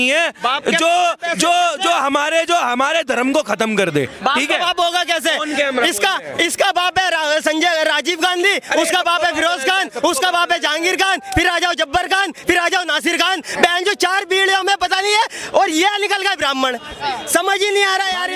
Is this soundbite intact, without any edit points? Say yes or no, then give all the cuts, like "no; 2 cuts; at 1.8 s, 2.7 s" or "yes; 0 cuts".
yes; 0 cuts